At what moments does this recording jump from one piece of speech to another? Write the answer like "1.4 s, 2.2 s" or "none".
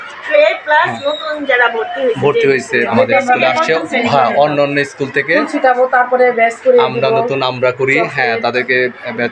2.9 s